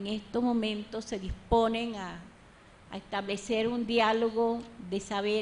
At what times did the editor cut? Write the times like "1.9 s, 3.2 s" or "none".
1.4 s